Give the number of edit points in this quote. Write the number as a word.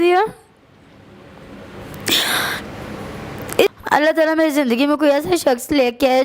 one